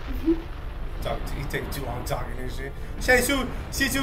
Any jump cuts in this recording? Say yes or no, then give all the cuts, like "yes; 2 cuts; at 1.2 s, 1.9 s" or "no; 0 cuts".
no; 0 cuts